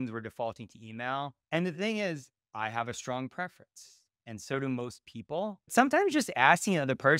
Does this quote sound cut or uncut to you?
cut